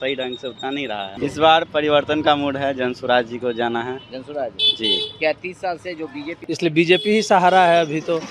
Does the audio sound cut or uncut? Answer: cut